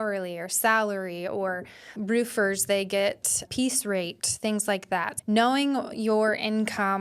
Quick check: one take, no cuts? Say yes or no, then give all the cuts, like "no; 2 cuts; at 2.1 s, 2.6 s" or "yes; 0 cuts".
no; 3 cuts; at 2.0 s, 3.4 s, 5.1 s